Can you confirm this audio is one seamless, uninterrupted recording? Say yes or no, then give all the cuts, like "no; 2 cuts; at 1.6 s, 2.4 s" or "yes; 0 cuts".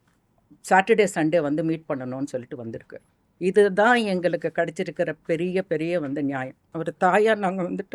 no; 1 cut; at 6.6 s